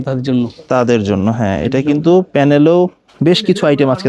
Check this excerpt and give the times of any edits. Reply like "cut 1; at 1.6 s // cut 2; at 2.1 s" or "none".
cut 1; at 3.1 s